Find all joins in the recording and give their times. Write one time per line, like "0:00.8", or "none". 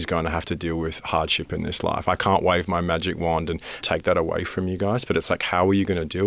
0:03.7